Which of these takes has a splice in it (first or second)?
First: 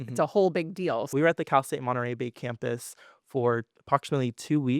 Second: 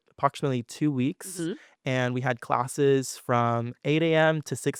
first